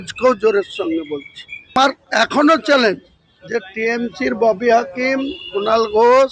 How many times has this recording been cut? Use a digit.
1